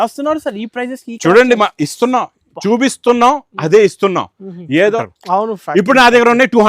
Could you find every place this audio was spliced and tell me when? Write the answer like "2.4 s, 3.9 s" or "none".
5.1 s